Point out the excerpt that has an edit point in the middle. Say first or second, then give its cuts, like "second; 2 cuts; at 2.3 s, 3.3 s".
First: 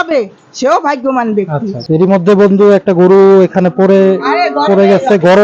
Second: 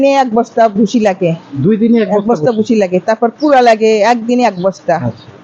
first; 1 cut; at 1.9 s